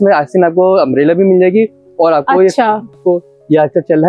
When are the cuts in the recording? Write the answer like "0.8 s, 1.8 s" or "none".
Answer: 2.9 s